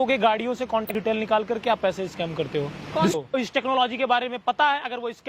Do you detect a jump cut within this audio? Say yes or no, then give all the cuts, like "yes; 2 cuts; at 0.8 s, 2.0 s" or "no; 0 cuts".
yes; 2 cuts; at 0.9 s, 3.1 s